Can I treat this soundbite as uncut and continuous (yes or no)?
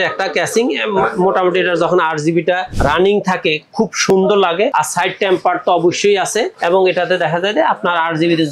no